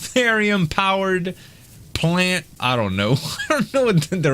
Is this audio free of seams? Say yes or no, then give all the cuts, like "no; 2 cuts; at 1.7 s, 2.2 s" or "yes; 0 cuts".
no; 1 cut; at 2.5 s